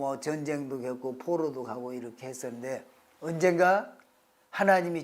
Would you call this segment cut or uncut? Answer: uncut